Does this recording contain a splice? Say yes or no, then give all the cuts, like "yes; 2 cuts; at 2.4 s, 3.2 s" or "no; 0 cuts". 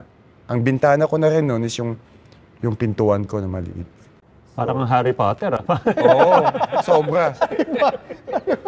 no; 0 cuts